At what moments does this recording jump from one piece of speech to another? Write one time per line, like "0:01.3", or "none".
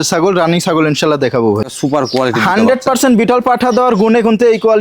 0:01.7